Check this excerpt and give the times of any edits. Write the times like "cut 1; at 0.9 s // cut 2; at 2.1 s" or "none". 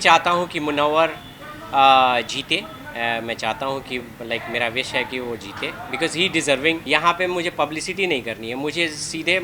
cut 1; at 6.8 s